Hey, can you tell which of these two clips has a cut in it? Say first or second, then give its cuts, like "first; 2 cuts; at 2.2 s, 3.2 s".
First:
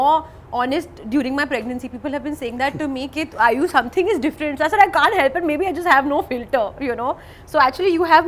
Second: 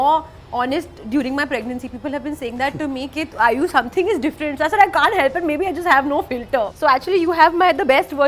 second; 1 cut; at 6.7 s